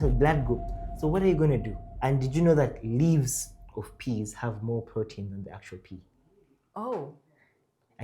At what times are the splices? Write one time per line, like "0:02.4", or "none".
0:01.8